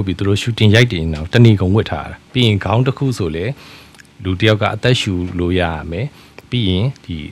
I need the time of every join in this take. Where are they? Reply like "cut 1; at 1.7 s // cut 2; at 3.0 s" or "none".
cut 1; at 2.1 s